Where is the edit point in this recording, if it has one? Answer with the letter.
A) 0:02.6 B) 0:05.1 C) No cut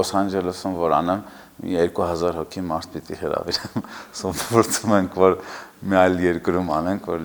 C